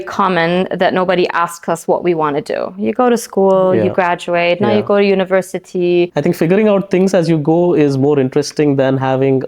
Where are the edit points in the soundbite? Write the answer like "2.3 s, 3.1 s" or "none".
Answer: 6.1 s